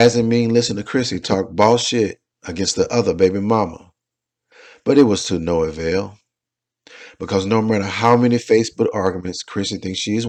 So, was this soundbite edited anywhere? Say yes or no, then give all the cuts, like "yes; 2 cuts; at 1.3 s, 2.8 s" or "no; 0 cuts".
no; 0 cuts